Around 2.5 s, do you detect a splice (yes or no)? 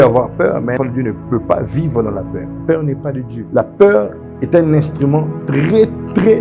yes